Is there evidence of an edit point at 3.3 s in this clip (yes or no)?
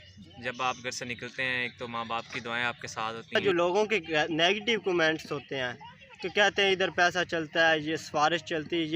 yes